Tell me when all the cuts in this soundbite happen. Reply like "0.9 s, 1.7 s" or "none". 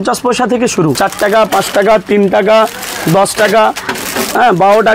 1.0 s